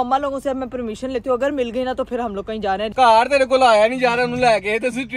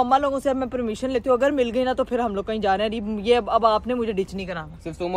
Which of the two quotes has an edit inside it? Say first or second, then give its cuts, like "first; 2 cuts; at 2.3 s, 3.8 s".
first; 1 cut; at 2.9 s